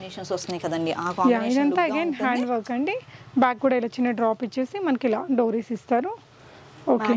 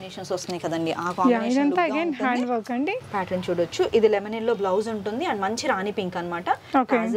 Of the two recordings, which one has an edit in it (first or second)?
second